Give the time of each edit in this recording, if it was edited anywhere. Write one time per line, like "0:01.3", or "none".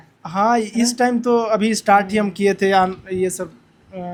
none